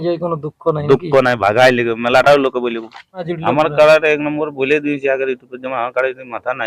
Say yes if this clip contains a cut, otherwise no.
yes